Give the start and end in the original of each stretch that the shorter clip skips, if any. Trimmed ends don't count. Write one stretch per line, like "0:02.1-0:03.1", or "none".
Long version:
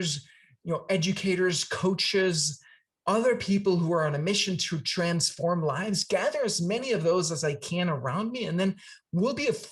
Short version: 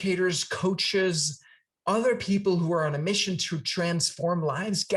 none